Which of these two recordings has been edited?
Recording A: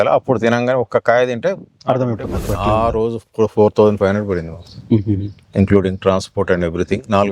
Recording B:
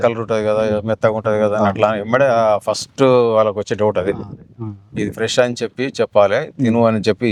A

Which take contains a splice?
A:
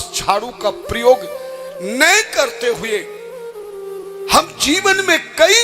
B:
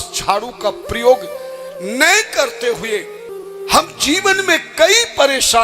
B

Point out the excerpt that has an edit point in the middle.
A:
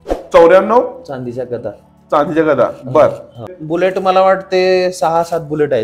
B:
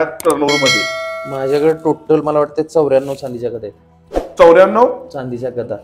A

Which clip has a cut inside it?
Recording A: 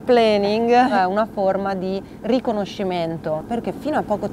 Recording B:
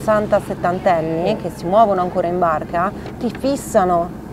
A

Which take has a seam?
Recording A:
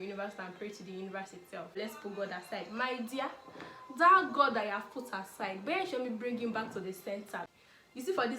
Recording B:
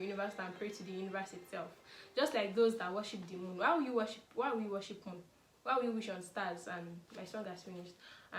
A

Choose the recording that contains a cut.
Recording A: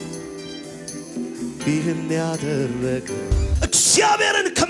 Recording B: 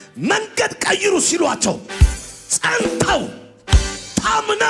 A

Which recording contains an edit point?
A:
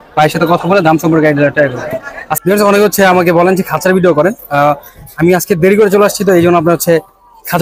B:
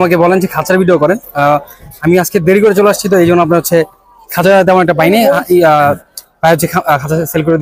A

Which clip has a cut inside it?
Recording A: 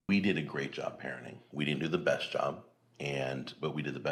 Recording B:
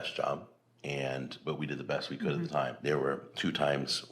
B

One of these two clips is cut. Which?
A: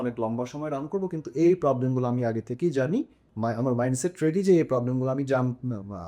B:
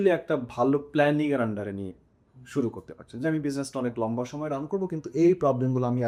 A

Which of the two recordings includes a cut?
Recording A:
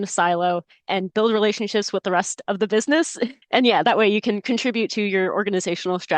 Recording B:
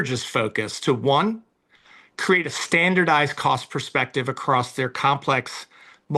A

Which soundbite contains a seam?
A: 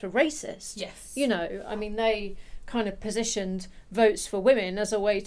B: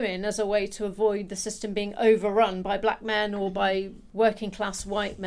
B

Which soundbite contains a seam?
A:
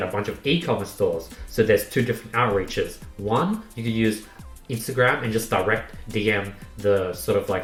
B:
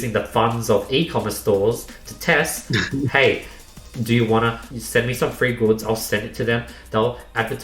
B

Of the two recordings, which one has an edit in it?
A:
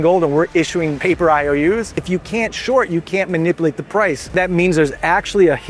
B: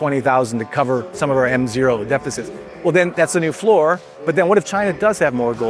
A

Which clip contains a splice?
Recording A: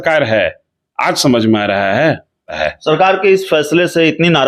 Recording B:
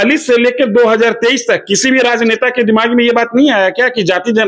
A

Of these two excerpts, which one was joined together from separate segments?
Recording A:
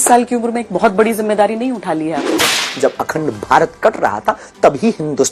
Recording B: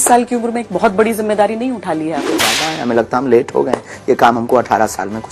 A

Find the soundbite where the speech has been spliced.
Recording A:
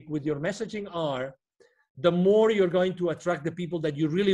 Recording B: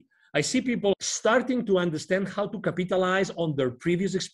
B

